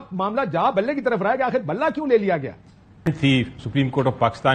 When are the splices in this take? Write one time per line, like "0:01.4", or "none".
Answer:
0:03.1

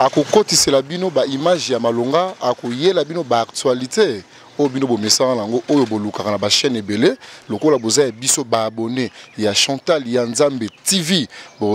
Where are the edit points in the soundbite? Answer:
none

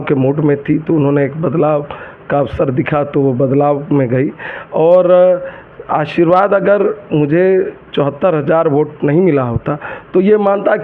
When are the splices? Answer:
none

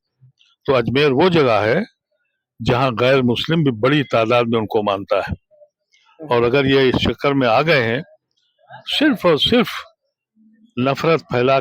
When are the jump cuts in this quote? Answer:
none

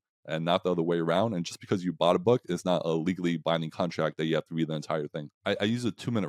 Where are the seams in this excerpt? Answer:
0:05.4

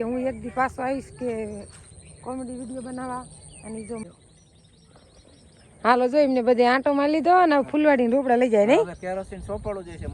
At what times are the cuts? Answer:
0:04.0

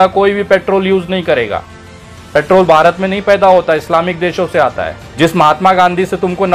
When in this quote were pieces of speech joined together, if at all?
0:05.0

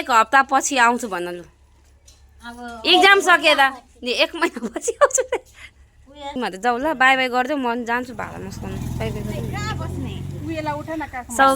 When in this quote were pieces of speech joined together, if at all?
0:06.3

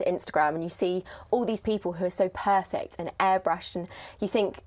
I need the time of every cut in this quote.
none

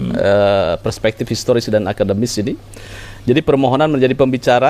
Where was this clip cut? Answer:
none

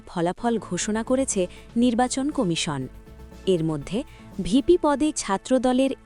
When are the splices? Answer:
none

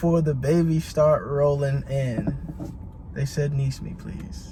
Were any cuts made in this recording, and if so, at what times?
none

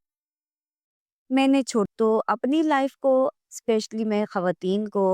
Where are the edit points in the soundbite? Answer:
0:01.9

